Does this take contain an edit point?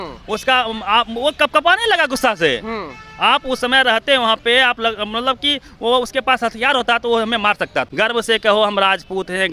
yes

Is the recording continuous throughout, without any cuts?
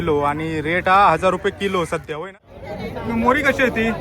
no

